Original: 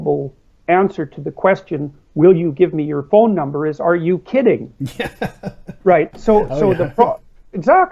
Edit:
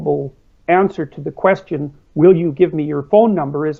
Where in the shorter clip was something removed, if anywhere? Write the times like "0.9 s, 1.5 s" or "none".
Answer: none